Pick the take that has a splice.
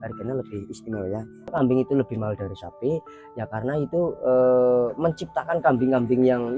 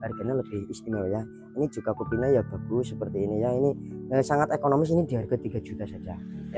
first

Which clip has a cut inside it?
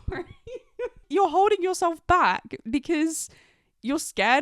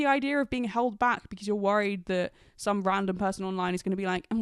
first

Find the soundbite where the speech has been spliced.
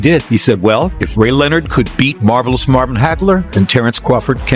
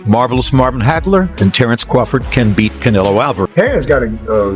second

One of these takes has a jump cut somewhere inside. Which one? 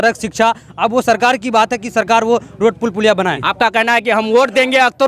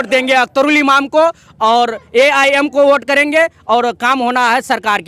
first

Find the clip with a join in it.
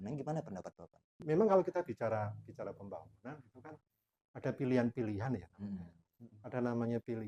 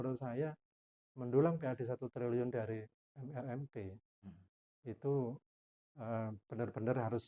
first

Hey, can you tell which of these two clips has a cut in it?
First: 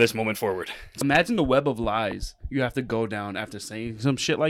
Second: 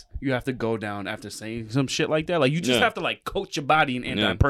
first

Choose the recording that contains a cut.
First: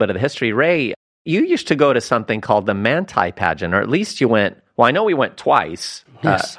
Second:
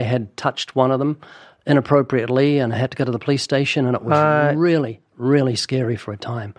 first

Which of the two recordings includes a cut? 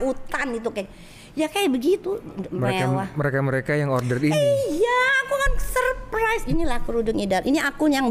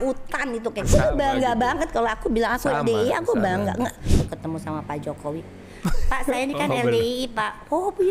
second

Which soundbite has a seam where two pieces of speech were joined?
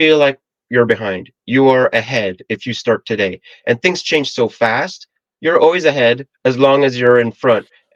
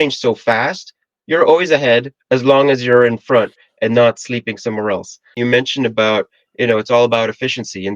second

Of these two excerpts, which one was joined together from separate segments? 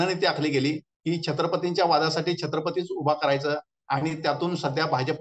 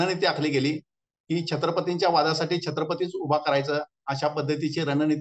first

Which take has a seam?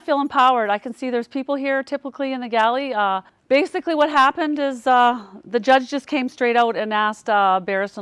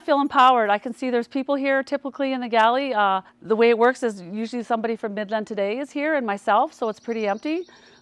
first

